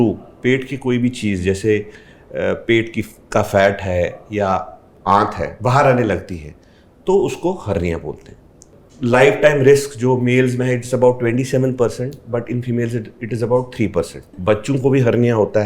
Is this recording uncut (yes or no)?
no